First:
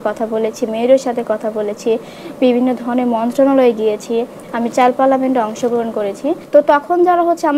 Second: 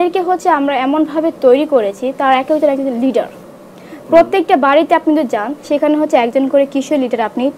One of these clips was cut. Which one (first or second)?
first